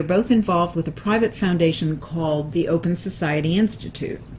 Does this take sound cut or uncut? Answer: uncut